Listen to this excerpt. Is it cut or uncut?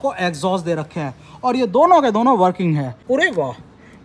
cut